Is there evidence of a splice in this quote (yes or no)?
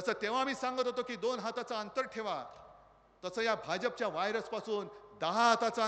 no